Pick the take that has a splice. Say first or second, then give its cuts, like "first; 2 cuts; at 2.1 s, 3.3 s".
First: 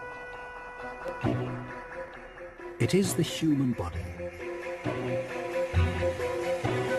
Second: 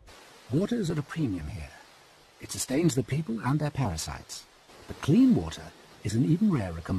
first; 1 cut; at 4.9 s